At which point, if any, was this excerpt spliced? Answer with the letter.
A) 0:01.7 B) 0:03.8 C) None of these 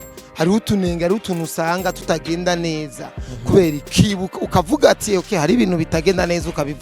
B